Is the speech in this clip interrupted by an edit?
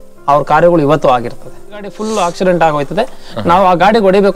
yes; 1 cut; at 2.0 s

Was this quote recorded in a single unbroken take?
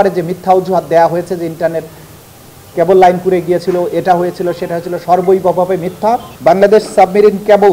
no; 1 cut; at 6.3 s

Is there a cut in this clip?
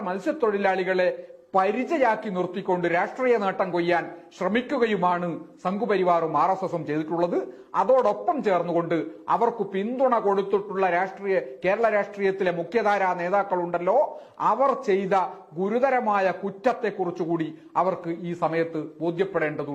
no; 0 cuts

